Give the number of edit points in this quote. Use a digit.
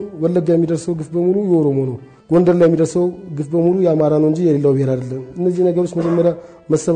0